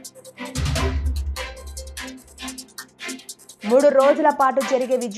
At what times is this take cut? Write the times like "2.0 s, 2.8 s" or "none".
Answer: 2.6 s